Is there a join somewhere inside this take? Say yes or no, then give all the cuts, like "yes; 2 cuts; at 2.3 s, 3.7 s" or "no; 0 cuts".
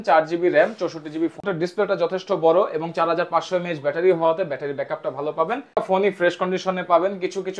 yes; 2 cuts; at 1.4 s, 5.8 s